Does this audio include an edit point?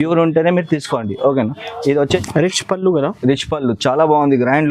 yes; 1 cut; at 2.2 s

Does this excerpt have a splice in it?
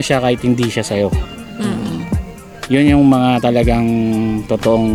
no; 0 cuts

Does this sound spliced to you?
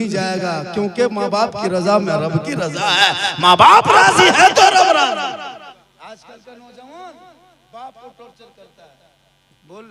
yes; 1 cut; at 5.8 s

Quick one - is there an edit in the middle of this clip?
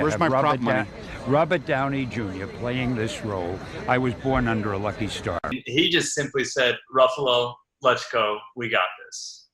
yes; 1 cut; at 5.5 s

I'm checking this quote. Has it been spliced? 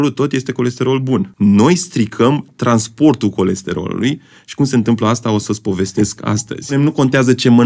yes; 2 cuts; at 1.3 s, 6.7 s

